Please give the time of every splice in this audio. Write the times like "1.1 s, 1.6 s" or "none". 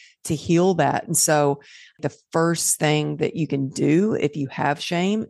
2.0 s